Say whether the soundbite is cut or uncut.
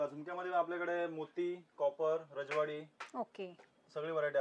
uncut